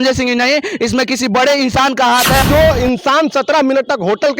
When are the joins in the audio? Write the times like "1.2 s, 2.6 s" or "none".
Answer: 2.4 s